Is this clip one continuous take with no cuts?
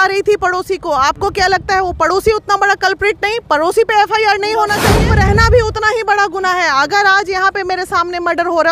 no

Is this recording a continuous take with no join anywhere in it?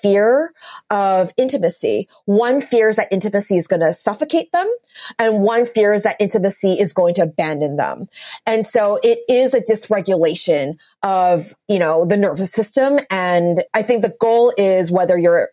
no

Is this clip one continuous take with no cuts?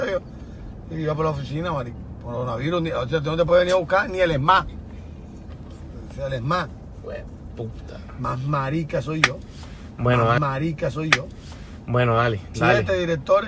no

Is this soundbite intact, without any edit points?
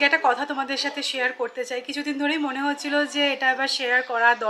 yes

